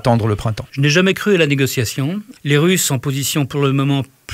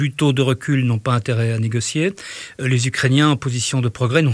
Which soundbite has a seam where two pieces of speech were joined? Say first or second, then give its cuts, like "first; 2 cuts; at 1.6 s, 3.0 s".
first; 1 cut; at 2.3 s